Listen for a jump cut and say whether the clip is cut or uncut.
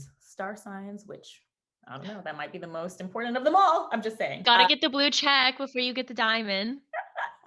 cut